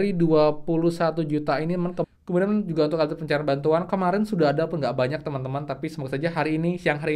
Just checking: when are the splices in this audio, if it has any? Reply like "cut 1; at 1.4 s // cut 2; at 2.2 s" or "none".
cut 1; at 2.1 s